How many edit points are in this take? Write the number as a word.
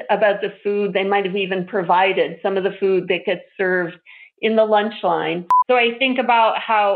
one